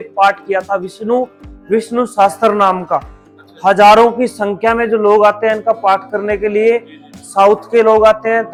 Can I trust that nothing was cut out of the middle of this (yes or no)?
yes